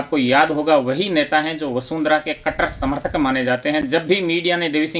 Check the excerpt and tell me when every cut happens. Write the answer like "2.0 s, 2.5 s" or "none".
none